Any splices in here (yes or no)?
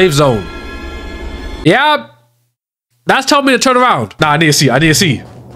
no